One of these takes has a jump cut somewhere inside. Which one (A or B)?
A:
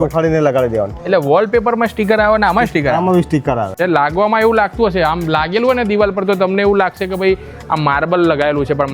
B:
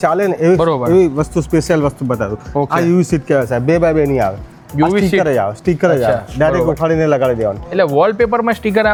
A